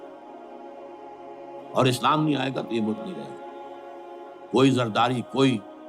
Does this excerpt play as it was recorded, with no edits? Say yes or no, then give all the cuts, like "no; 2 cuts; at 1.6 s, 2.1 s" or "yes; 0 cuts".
no; 1 cut; at 1.2 s